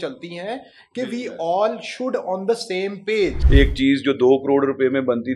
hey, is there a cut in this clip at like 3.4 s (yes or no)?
yes